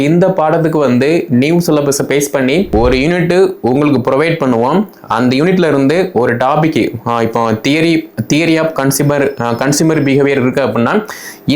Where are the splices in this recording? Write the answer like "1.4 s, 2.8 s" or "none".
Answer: 2.7 s